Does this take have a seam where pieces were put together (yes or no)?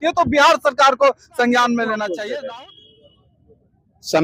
yes